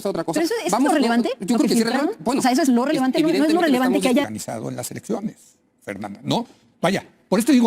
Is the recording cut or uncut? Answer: cut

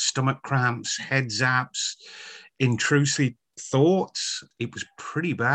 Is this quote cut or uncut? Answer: cut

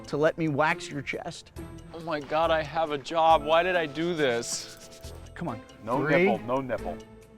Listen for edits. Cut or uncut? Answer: cut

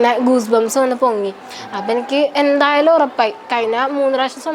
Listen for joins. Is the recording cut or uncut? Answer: uncut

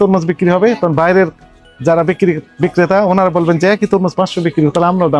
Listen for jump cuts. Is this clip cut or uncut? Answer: uncut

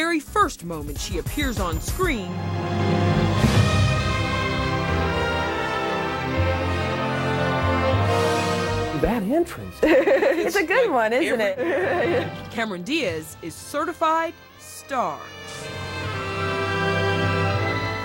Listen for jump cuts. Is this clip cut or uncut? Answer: uncut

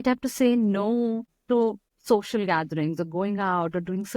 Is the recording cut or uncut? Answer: cut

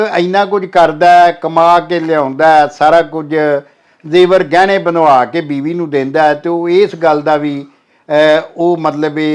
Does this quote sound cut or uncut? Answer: uncut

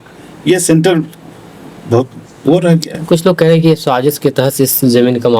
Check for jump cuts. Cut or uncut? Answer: uncut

